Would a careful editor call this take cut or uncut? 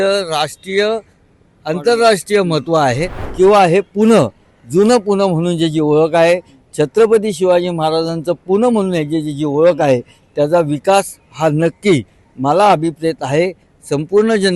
cut